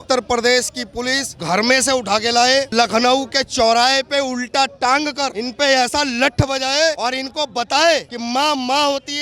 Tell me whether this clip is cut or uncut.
uncut